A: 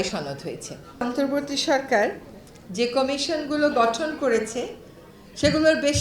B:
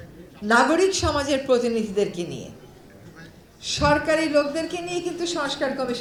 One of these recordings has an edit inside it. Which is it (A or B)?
A